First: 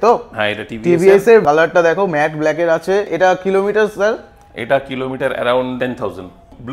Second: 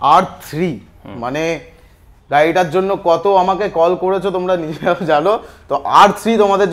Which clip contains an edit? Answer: first; 3 cuts; at 1.4 s, 3.1 s, 6.0 s

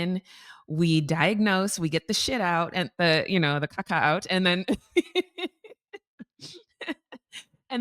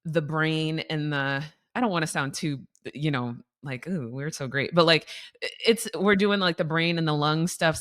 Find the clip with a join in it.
first; 1 cut; at 2.9 s

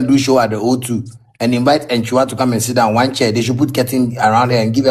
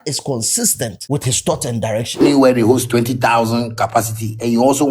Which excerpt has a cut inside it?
second; 2 cuts; at 1.0 s, 2.2 s

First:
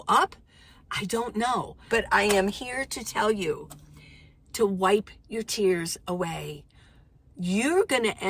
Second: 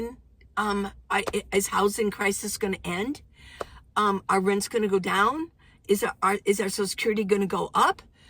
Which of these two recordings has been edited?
first; 1 cut; at 1.8 s

